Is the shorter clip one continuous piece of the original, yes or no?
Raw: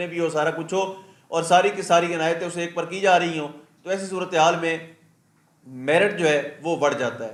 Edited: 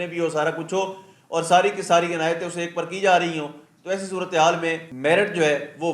no